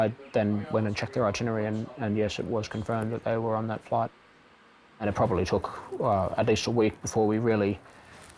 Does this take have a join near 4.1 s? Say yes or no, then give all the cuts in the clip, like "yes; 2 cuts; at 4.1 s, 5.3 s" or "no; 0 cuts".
no; 1 cut; at 1.0 s